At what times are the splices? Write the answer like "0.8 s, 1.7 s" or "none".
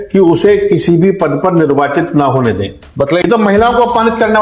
3.2 s